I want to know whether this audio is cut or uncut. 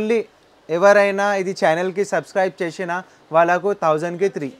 uncut